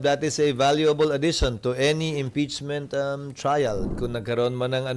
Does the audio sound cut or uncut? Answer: cut